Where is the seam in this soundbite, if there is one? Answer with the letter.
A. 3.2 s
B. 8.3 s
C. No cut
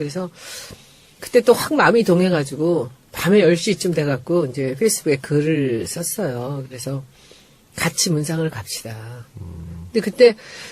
B